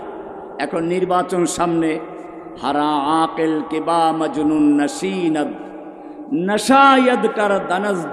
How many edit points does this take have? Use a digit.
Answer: 0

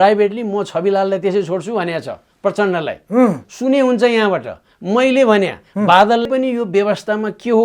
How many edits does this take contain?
1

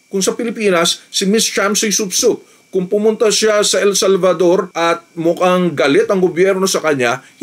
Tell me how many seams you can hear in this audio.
1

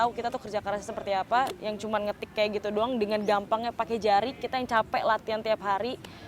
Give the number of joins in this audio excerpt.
0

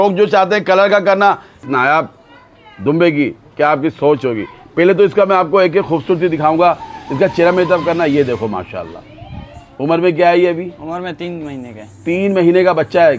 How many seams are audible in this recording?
1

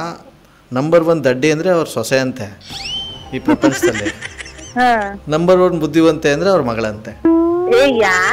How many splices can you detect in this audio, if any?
0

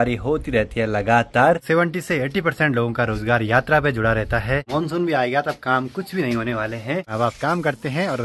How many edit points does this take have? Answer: 3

